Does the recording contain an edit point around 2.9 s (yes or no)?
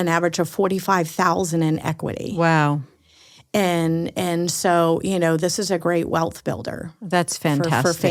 no